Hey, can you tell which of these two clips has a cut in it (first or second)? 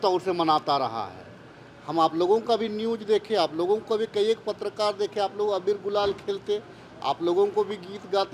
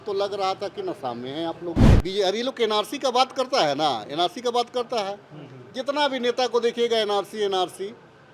second